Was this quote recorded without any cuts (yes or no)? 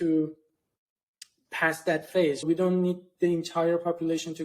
no